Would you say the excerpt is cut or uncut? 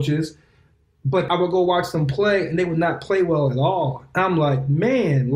cut